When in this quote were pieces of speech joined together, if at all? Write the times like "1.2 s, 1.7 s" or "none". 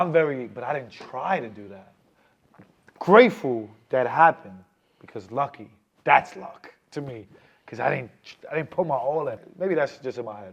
9.4 s